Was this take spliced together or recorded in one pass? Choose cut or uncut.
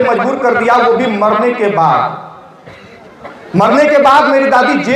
uncut